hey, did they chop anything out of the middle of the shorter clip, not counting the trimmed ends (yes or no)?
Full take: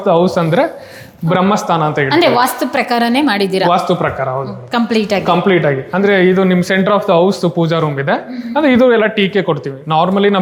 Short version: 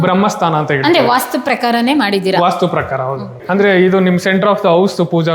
yes